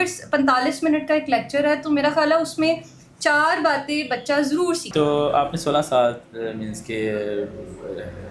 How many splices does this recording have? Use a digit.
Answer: 1